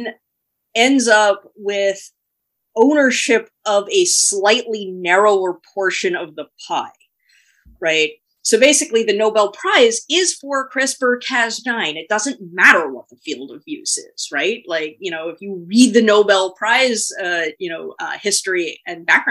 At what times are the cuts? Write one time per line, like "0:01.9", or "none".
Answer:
none

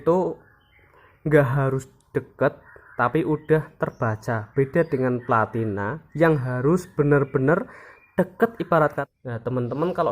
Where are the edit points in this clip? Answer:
0:09.0

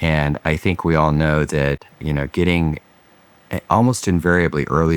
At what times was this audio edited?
none

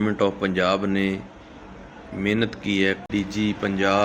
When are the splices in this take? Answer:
0:03.0

